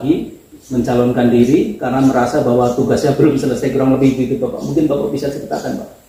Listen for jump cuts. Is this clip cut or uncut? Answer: uncut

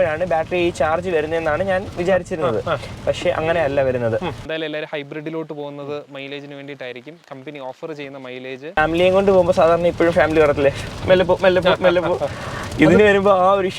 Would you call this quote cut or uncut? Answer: cut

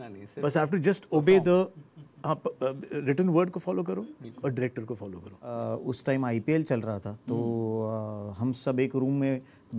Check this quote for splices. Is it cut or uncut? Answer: cut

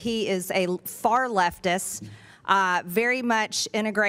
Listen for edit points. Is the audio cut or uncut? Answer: uncut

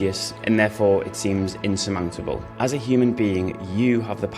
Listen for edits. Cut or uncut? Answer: cut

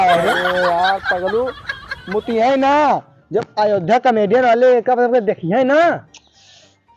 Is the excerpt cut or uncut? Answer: uncut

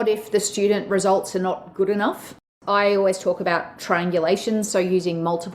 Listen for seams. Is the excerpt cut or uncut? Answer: cut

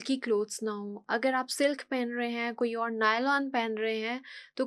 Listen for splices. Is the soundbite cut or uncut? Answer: uncut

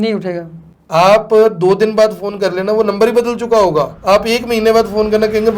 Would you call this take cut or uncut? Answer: cut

